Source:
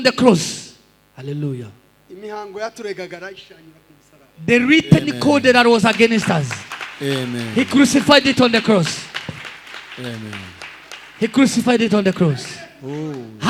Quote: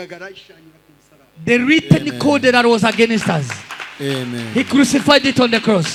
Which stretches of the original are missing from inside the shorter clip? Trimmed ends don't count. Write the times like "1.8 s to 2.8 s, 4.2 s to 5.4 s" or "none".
none

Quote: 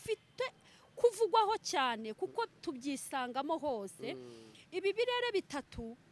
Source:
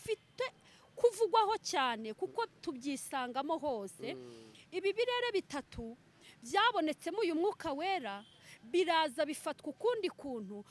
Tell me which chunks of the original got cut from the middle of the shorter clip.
none

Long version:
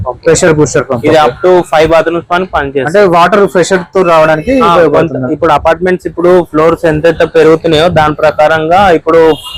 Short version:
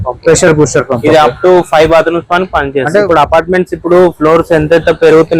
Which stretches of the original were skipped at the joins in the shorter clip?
3.0 s to 5.4 s

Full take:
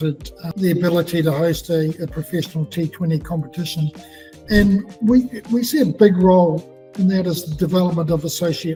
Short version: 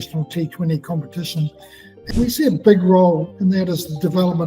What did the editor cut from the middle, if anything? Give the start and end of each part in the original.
4.4 s to 5.3 s, 6.6 s to 6.9 s

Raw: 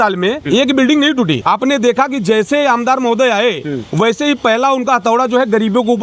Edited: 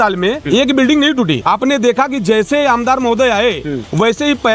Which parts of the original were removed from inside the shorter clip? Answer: none

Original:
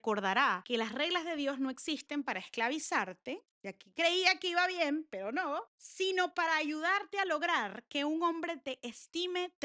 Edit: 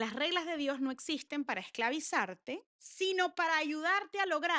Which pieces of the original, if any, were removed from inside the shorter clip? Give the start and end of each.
3.6 s to 5.8 s

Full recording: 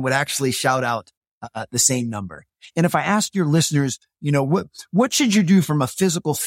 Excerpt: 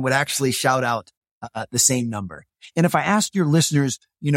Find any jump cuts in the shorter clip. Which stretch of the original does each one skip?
none

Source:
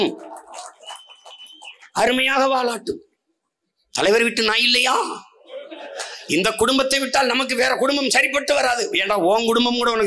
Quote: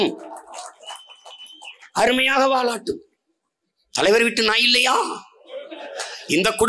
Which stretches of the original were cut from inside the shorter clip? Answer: none

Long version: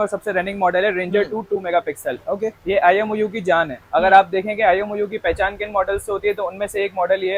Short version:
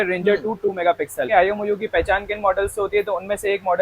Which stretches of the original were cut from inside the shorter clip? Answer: 2.1 s to 4.6 s

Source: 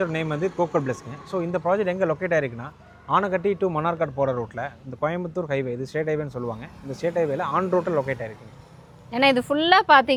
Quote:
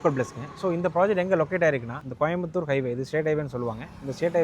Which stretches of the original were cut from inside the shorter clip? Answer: 2.7 s to 4.8 s

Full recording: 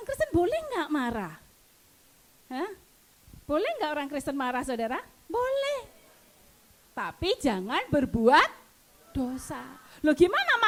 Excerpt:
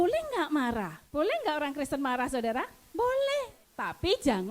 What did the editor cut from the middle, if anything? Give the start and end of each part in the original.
1.4 s to 3.3 s, 6.0 s to 6.8 s

